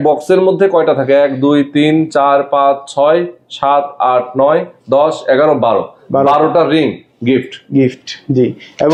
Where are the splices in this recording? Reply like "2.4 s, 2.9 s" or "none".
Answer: none

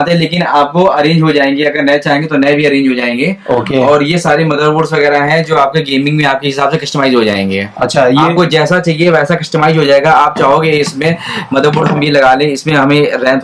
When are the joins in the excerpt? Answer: none

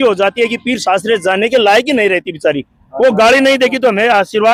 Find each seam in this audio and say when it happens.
none

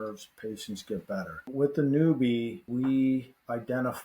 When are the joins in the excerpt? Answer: 1.5 s, 2.7 s

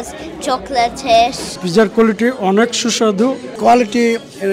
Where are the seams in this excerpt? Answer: 1.6 s, 3.5 s

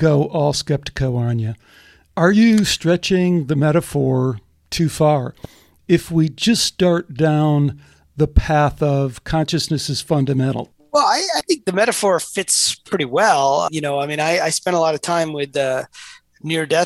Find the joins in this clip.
10.7 s, 13.7 s

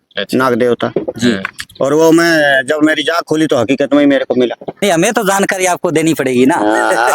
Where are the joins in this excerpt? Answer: 4.8 s

